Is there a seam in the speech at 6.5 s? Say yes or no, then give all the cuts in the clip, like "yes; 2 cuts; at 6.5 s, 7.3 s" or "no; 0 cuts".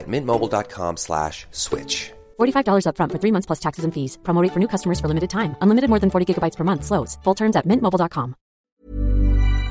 no; 1 cut; at 8.6 s